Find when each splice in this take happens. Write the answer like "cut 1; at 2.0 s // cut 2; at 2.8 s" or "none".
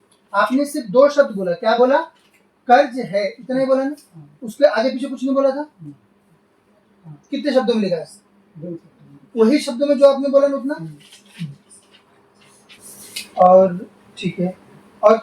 cut 1; at 12.8 s